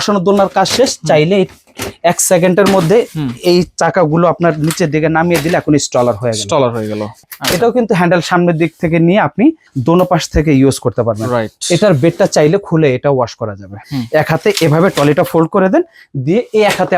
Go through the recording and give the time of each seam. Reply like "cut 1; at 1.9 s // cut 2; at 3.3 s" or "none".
cut 1; at 7.2 s // cut 2; at 9.7 s // cut 3; at 13.8 s